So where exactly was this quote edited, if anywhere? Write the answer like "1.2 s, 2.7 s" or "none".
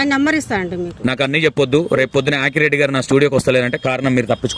0.9 s